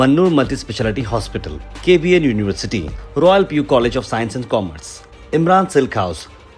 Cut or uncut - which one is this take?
uncut